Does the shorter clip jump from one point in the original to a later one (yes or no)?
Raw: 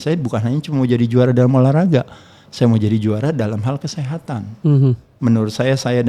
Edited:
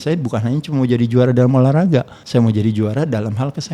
yes